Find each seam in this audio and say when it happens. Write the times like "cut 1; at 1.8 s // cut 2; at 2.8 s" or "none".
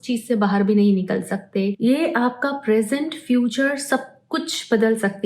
cut 1; at 1.8 s